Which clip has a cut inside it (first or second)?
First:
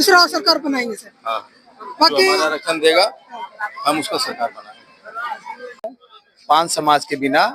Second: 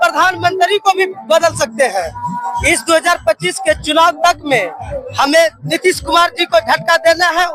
first